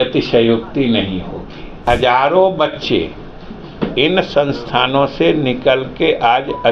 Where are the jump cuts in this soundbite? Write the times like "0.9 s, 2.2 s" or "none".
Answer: 1.8 s